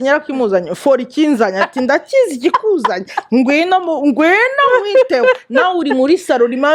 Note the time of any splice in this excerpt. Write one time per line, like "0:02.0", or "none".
none